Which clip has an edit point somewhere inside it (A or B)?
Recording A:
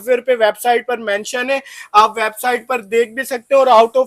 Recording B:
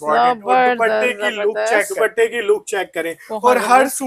B